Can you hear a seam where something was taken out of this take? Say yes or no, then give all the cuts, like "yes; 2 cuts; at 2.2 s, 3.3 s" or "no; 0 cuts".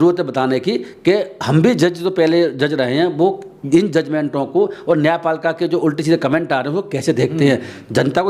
no; 0 cuts